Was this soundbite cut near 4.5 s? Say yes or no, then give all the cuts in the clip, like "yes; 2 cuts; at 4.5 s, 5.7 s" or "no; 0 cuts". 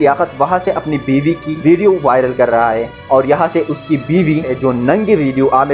yes; 2 cuts; at 1.6 s, 4.5 s